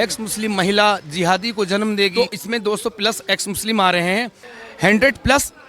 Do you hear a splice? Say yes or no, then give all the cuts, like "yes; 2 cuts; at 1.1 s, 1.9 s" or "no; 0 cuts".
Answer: yes; 2 cuts; at 2.1 s, 4.7 s